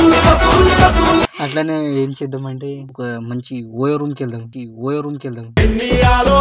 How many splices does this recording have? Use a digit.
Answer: 1